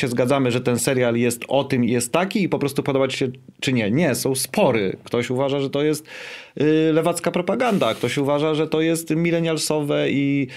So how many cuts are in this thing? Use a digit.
0